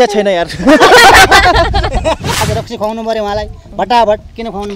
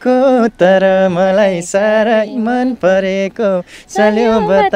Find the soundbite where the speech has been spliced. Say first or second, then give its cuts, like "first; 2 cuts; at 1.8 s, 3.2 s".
first; 1 cut; at 2.4 s